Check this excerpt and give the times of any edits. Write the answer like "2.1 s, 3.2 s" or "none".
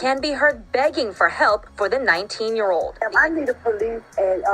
3.0 s